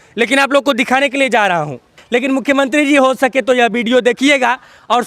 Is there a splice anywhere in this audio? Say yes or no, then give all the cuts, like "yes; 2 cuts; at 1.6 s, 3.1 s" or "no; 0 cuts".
yes; 1 cut; at 2.0 s